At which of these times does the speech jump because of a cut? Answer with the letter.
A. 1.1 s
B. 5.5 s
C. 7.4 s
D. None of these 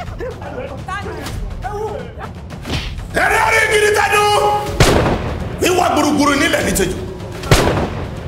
A